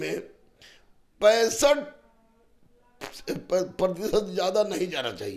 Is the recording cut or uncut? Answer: uncut